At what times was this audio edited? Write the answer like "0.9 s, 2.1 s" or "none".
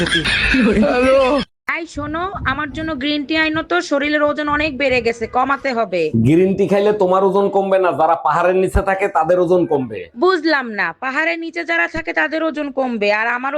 1.6 s